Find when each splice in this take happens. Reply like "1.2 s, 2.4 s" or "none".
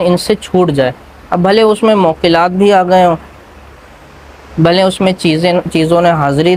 none